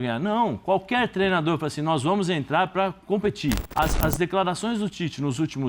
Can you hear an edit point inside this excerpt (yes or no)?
yes